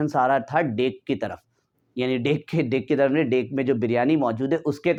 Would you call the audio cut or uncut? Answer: uncut